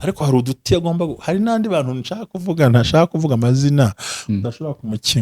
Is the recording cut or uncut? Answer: uncut